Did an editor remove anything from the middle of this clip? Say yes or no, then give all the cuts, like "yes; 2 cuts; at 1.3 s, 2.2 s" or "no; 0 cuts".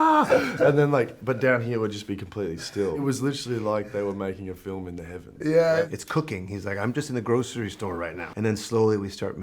yes; 3 cuts; at 3.0 s, 5.9 s, 8.2 s